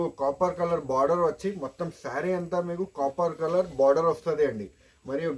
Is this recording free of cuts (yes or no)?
yes